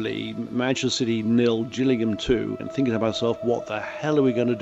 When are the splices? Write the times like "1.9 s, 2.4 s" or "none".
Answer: 2.6 s